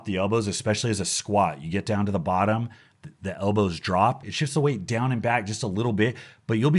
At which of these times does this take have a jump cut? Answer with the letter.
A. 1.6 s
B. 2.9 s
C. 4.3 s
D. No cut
C